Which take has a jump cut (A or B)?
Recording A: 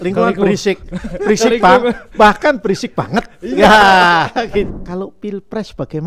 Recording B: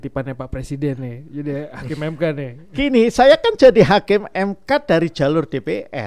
A